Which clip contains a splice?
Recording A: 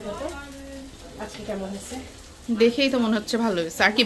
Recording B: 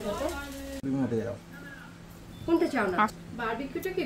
B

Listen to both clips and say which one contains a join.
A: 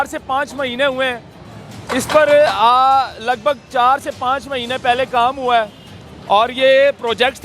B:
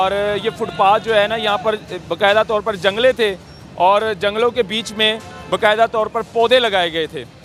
A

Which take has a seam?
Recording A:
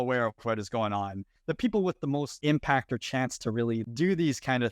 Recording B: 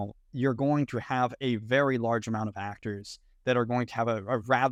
A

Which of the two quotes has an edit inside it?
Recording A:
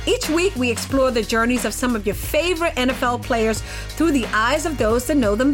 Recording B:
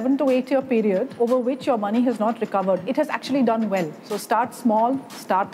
B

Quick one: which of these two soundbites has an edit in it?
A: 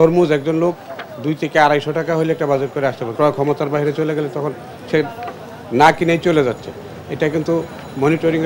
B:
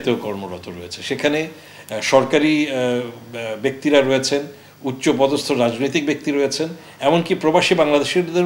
A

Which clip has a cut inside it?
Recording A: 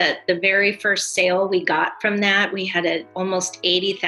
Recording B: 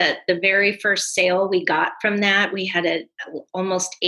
A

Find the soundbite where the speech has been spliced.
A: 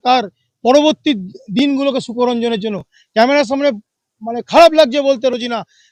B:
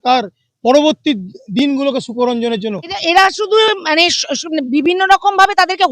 B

